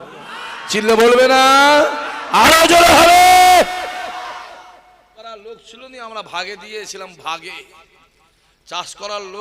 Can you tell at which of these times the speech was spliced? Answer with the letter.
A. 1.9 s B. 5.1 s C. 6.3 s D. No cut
B